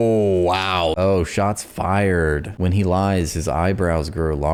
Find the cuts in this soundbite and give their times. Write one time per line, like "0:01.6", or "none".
none